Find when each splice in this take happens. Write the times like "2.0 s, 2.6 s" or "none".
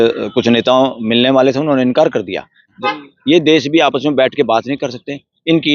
2.7 s